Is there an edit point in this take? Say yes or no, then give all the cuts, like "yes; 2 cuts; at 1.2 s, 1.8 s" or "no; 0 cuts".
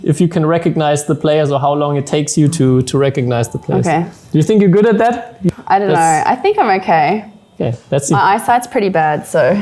yes; 1 cut; at 5.4 s